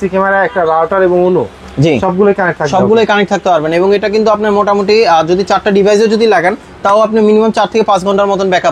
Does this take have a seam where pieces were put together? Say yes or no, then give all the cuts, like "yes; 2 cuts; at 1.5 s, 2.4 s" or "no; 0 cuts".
no; 0 cuts